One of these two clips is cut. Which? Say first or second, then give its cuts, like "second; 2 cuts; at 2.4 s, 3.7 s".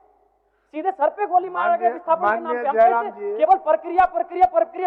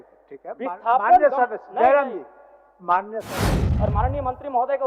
second; 1 cut; at 3.7 s